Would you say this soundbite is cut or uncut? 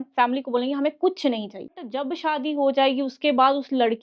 cut